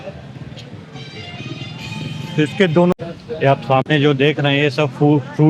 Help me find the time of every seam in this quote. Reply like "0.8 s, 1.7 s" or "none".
2.9 s